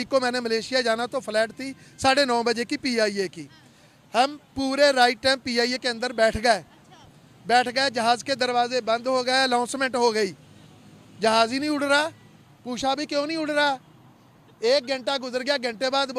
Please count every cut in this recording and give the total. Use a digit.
0